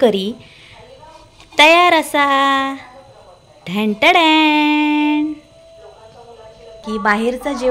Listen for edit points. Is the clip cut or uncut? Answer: cut